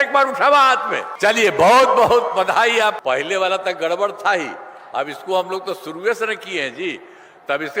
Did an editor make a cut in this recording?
yes; 2 cuts; at 1.0 s, 3.0 s

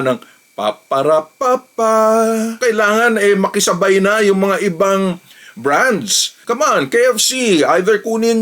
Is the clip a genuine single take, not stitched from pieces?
no; 2 cuts; at 2.6 s, 6.4 s

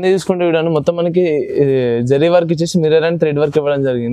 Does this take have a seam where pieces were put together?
no; 0 cuts

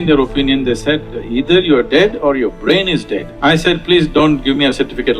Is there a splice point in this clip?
yes; 1 cut; at 3.3 s

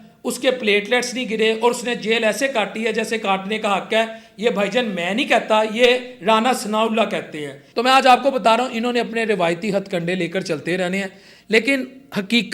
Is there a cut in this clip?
no; 0 cuts

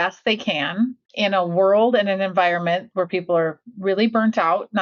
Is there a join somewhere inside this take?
yes; 1 cut; at 1.0 s

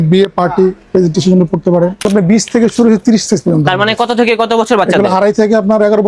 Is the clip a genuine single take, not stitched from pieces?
no; 1 cut; at 2.1 s

